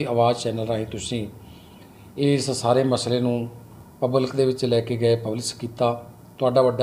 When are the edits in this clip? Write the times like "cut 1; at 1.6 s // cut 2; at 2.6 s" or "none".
none